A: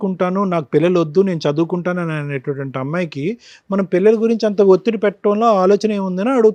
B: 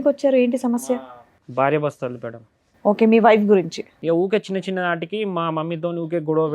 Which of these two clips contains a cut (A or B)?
B